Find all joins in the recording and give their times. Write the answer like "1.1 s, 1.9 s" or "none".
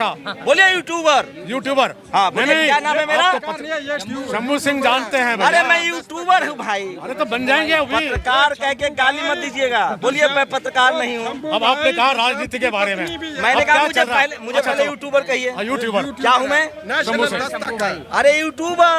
none

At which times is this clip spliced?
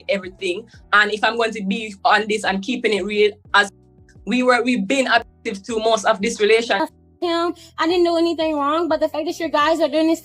6.8 s

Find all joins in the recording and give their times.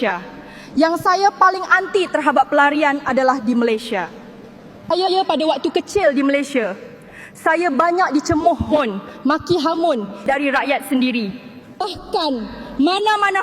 10.2 s

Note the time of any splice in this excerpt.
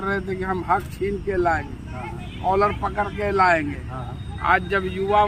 none

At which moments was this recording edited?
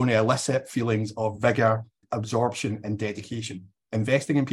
2.0 s

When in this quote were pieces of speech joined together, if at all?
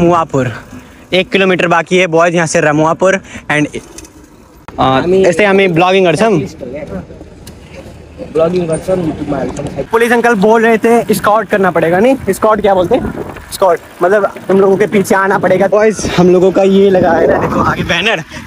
9.9 s, 15.7 s

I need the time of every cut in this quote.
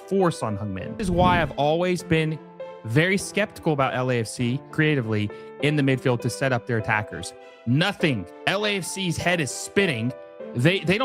1.0 s, 4.7 s, 8.3 s

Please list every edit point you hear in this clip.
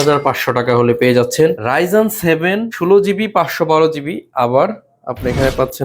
1.6 s, 2.7 s

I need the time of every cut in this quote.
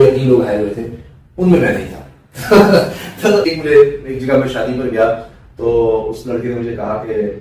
3.5 s

